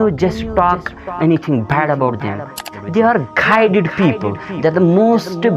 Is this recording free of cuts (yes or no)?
no